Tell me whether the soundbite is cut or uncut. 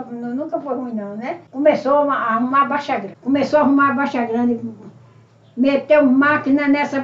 cut